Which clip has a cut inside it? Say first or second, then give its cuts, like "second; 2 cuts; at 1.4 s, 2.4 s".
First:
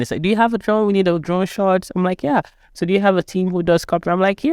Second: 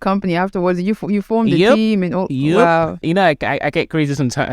second; 1 cut; at 3.0 s